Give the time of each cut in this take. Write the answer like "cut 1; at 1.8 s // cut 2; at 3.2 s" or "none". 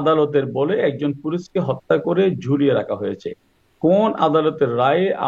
none